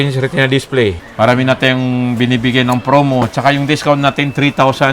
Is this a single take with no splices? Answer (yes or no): no